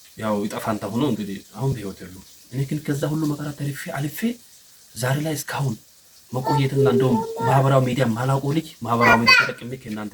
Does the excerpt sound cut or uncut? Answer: uncut